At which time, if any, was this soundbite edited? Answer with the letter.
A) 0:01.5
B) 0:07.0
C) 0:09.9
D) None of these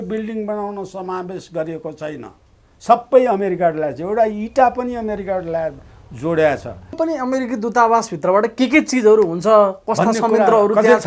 B